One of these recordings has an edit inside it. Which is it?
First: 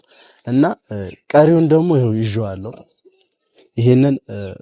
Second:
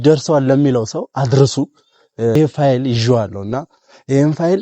second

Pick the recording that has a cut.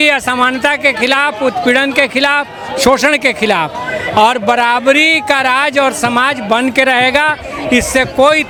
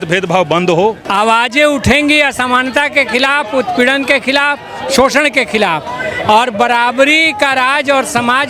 second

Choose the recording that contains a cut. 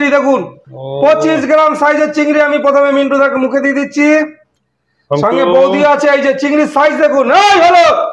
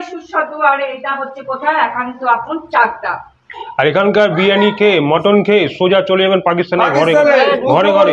second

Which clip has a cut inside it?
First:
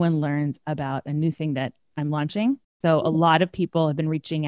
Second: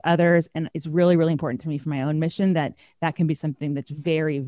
first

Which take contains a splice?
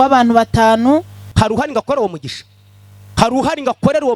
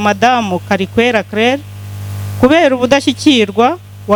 first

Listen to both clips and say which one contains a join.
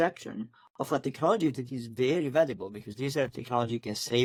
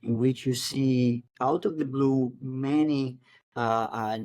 second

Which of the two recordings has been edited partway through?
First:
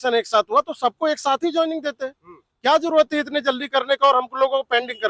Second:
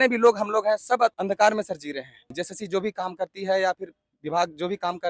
second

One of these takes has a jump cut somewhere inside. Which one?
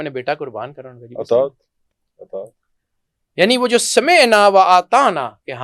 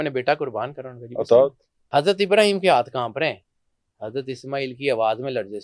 second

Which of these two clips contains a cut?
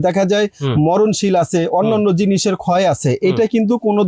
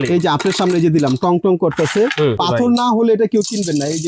second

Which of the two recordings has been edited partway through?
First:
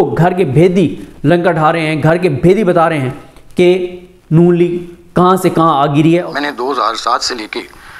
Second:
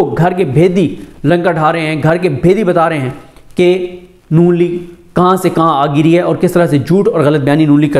first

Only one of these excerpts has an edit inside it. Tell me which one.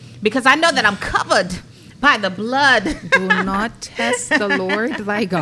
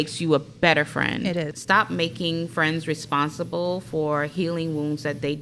second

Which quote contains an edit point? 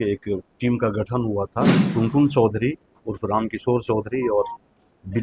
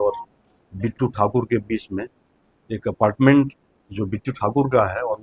first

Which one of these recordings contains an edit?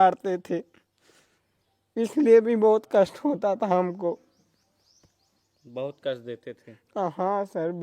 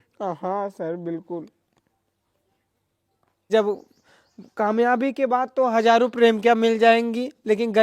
second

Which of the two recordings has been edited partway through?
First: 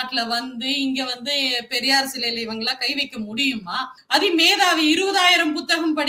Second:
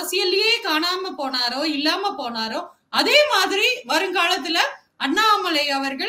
first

